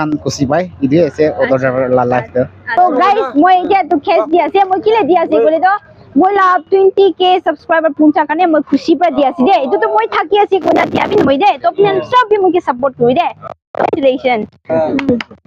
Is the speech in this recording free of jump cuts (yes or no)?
no